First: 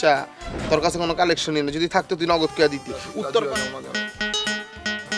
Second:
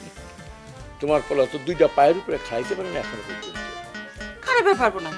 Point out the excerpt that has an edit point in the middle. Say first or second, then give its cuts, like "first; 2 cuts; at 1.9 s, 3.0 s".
first; 1 cut; at 3.2 s